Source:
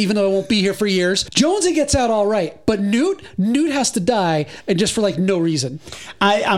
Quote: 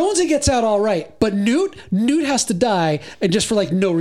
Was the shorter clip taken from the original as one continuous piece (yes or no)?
yes